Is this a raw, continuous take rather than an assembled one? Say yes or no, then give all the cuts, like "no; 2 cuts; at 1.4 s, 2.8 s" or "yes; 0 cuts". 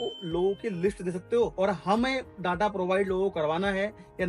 no; 1 cut; at 1.5 s